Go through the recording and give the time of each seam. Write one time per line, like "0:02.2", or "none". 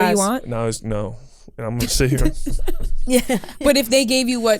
none